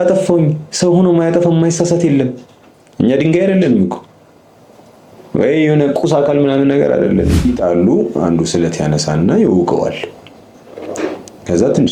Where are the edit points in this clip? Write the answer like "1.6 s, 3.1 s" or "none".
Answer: 7.4 s

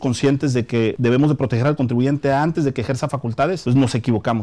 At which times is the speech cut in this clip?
1.0 s, 3.6 s

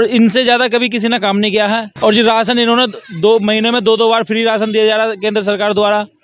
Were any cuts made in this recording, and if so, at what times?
1.9 s

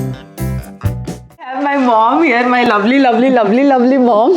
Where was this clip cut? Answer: 1.6 s

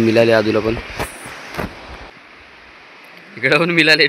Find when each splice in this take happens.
2.1 s

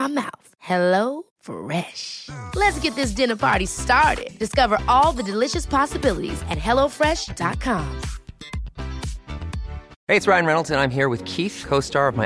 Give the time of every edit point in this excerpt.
9.9 s

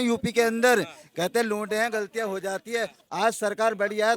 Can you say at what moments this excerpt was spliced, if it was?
3.0 s

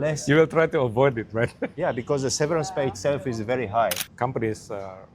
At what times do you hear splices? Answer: 4.0 s

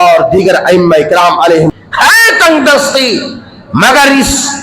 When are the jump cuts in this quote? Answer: 1.7 s

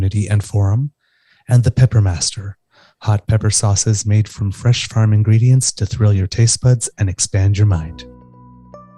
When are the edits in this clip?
7.9 s

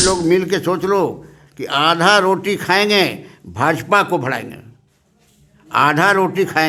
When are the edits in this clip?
none

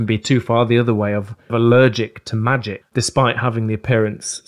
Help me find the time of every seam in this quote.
1.5 s, 2.8 s

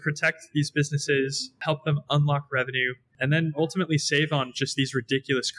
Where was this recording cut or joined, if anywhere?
1.6 s, 3.1 s

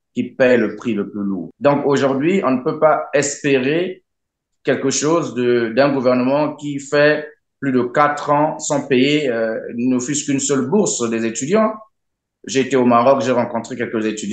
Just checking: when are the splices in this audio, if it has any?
1.4 s

